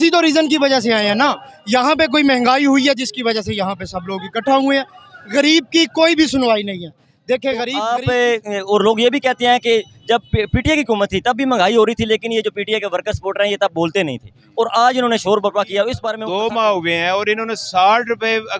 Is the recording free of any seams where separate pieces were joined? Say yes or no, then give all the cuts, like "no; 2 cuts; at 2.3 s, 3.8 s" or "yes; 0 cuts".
no; 2 cuts; at 7.7 s, 16.1 s